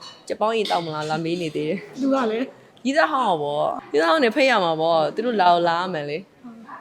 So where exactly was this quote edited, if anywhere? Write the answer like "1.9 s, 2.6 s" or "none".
3.8 s